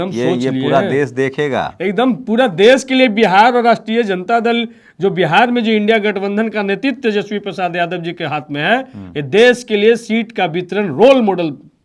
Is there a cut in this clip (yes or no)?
no